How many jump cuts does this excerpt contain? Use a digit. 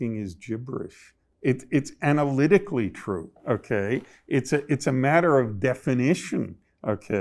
1